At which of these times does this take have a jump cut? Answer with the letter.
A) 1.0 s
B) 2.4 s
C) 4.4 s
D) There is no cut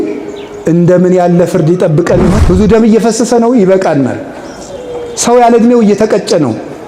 B